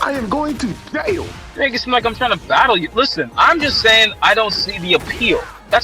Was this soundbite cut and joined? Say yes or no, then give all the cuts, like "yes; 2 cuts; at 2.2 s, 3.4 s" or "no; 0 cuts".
no; 0 cuts